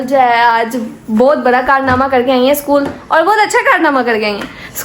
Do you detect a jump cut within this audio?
no; 0 cuts

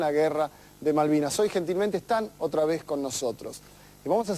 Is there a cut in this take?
yes; 1 cut; at 0.9 s

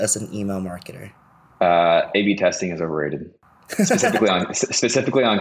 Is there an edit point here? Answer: no; 0 cuts

